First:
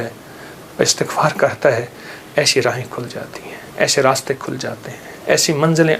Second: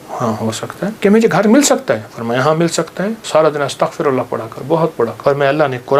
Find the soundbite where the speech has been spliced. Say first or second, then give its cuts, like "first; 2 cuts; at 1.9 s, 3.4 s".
second; 3 cuts; at 1.0 s, 3.2 s, 5.2 s